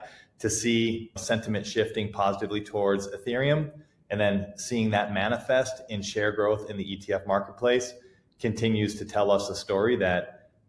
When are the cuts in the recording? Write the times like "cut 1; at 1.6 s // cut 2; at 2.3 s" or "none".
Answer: cut 1; at 1.2 s